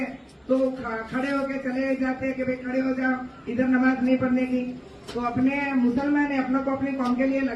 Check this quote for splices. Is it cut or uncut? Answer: uncut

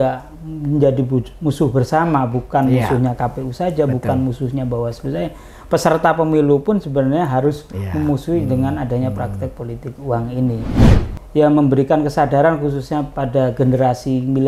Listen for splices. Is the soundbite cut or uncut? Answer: cut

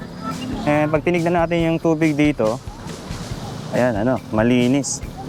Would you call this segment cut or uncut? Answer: uncut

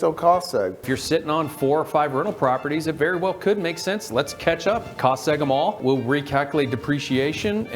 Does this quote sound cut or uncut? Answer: cut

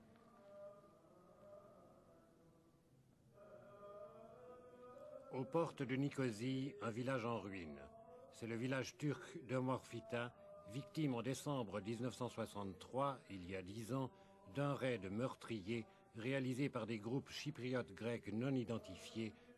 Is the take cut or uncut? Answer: uncut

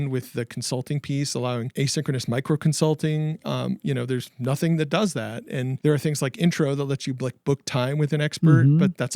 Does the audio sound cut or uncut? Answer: cut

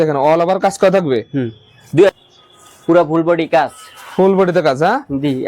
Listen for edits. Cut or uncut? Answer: cut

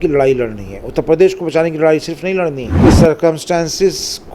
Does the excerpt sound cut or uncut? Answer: cut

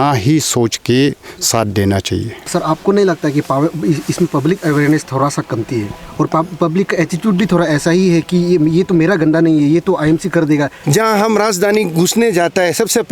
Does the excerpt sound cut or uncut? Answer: cut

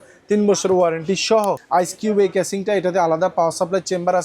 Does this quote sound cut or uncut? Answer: cut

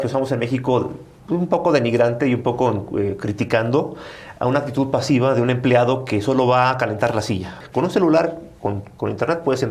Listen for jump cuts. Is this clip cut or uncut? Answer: cut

